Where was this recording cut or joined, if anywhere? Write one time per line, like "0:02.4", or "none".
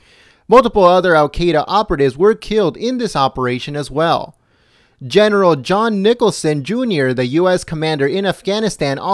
0:05.2